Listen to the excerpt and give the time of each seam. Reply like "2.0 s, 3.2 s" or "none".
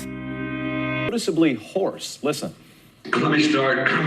1.1 s